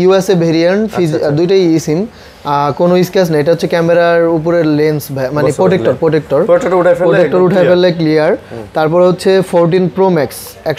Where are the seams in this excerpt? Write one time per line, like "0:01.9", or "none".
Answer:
none